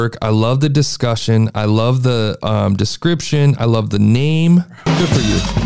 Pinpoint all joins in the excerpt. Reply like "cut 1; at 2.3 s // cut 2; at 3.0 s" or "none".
none